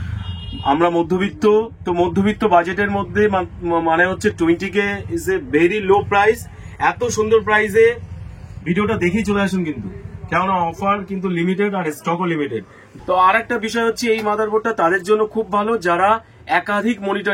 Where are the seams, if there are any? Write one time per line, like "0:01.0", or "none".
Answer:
0:12.8